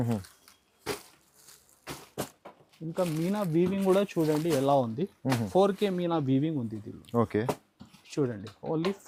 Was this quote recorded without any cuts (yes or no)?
yes